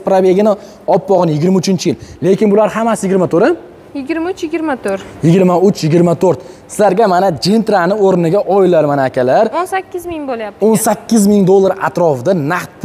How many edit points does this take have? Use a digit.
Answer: 0